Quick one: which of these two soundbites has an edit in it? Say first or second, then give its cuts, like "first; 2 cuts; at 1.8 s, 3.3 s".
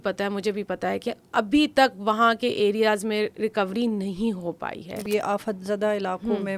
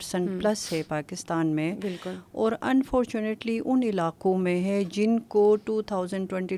first; 1 cut; at 5.1 s